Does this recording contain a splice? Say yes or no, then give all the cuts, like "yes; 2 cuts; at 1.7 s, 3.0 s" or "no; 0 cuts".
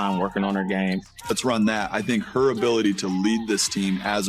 yes; 1 cut; at 1.3 s